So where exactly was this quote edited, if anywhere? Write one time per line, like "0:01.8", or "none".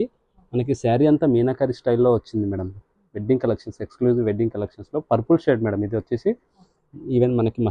none